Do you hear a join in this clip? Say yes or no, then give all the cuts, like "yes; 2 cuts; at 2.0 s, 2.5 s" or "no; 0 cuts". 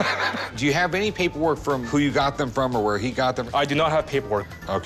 no; 0 cuts